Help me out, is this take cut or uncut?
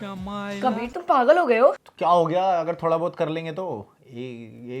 cut